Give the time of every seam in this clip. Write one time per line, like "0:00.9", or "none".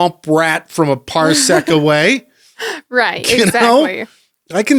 none